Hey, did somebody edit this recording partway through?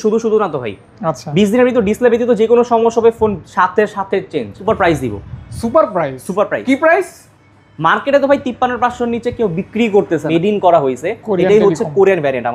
yes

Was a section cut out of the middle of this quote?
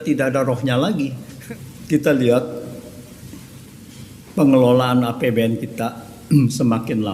yes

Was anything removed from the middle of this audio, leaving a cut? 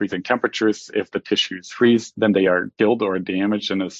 no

